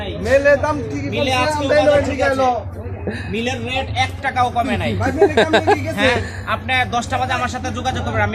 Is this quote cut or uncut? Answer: uncut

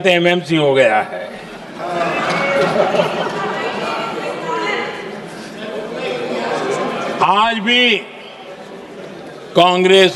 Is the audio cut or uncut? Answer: uncut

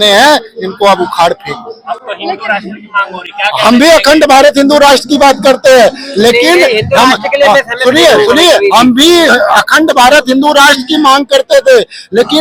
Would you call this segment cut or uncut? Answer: uncut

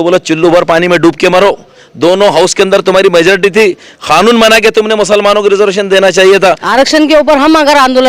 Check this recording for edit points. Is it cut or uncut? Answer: cut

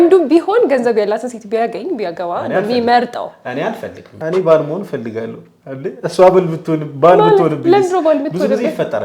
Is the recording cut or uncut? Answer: cut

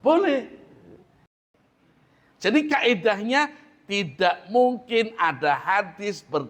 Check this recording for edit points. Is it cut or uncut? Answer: cut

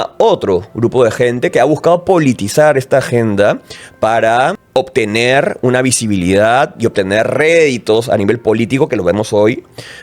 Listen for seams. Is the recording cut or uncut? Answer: cut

